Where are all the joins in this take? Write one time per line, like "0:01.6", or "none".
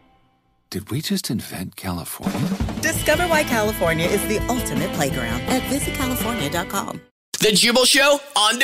0:07.3